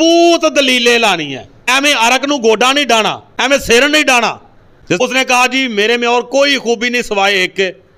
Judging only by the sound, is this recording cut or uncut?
cut